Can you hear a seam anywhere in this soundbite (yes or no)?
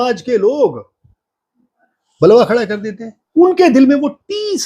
yes